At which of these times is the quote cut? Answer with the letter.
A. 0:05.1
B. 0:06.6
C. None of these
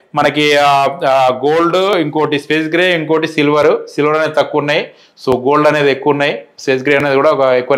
C